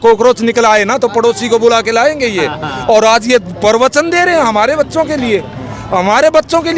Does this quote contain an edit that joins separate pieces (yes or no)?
no